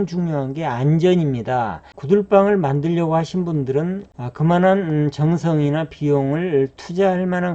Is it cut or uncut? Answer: cut